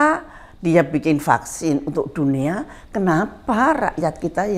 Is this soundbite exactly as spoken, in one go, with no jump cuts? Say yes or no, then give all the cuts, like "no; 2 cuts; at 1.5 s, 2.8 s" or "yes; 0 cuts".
yes; 0 cuts